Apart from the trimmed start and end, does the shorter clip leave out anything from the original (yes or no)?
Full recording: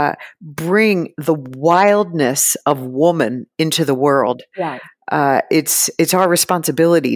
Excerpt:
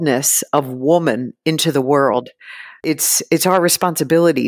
yes